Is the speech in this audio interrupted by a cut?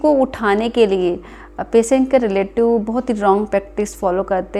no; 0 cuts

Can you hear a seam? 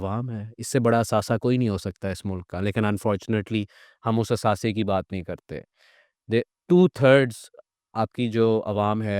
no; 0 cuts

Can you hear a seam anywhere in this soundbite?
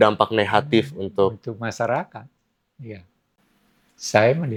no; 0 cuts

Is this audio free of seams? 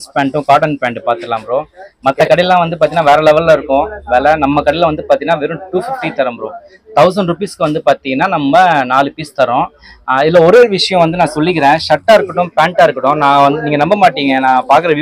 yes; 0 cuts

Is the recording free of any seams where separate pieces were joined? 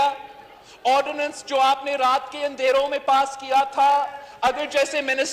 yes; 0 cuts

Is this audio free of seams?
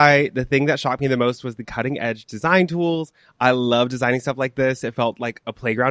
yes; 0 cuts

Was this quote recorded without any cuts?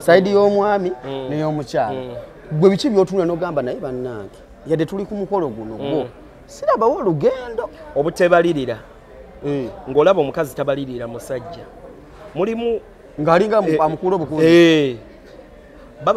yes; 0 cuts

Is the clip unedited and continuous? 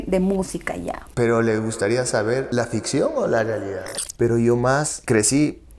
no; 4 cuts; at 1.1 s, 2.5 s, 3.8 s, 4.9 s

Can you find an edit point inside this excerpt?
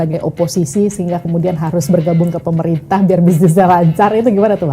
no; 0 cuts

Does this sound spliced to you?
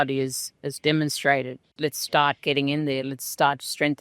yes; 1 cut; at 1.7 s

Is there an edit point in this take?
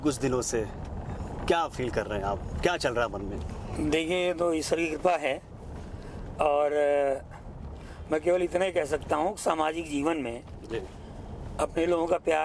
no; 0 cuts

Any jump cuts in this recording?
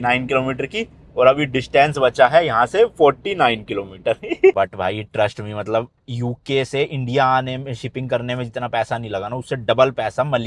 yes; 1 cut; at 4.5 s

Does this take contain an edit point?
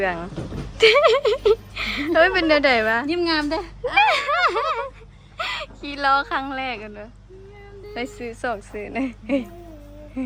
no; 0 cuts

